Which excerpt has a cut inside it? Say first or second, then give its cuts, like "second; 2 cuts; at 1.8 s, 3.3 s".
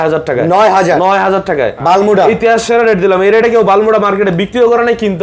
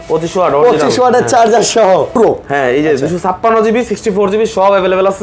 second; 1 cut; at 2.2 s